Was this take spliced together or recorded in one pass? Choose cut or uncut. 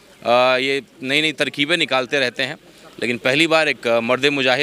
uncut